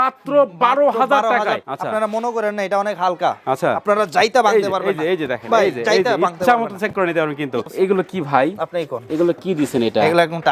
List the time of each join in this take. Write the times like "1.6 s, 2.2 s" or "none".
1.7 s, 7.6 s